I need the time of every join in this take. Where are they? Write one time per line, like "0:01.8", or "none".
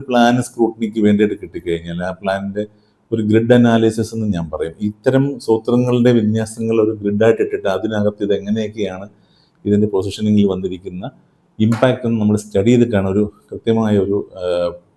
none